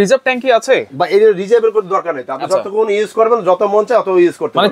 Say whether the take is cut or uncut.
uncut